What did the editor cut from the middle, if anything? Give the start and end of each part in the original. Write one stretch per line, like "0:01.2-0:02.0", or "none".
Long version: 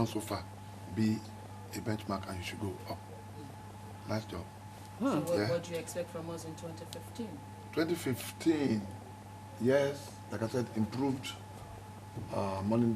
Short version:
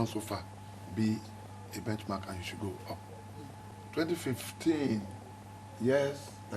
0:03.7-0:07.5